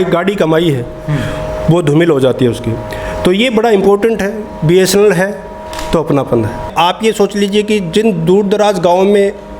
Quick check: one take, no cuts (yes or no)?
no